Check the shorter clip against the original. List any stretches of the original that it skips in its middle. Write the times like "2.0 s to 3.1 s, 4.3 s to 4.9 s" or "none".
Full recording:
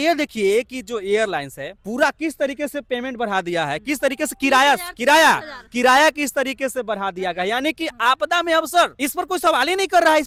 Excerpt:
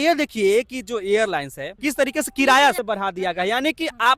1.7 s to 3.8 s, 4.9 s to 6.8 s